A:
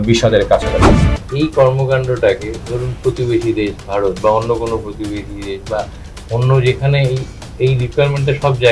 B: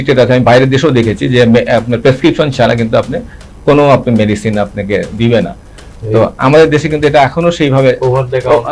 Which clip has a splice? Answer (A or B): A